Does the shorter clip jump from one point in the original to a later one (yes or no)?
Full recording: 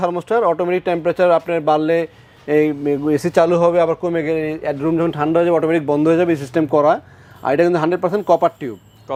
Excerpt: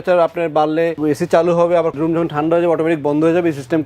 yes